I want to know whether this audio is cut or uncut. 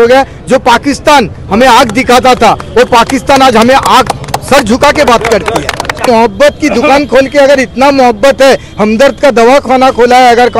cut